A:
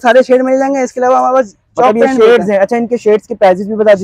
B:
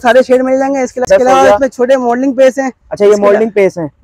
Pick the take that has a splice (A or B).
B